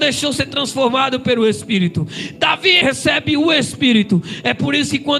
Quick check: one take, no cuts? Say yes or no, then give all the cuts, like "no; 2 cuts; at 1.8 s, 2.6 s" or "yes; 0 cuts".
no; 1 cut; at 2.8 s